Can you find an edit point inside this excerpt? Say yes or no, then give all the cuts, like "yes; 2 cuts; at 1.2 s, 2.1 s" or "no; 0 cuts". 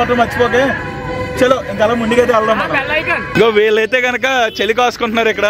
yes; 1 cut; at 3.2 s